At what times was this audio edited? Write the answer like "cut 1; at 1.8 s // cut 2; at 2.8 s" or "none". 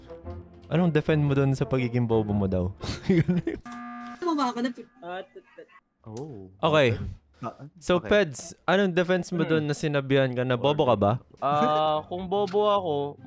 cut 1; at 11.3 s